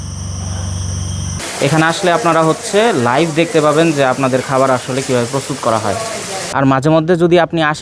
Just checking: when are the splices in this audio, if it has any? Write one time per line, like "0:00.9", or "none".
0:01.4
0:06.1